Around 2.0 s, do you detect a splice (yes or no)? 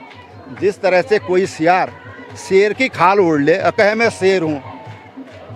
no